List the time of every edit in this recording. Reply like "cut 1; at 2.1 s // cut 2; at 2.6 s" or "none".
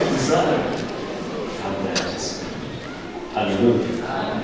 none